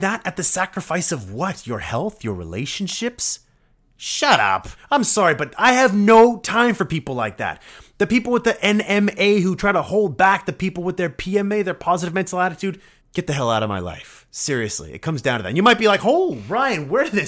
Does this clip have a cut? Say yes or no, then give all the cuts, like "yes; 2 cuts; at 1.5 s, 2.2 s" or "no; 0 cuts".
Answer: yes; 2 cuts; at 4.7 s, 12.9 s